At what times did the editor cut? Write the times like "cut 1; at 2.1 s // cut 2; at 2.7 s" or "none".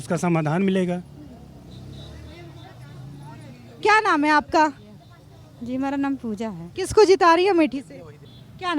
none